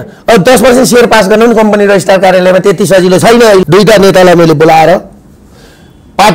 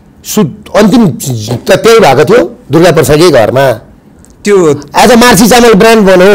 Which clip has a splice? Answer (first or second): first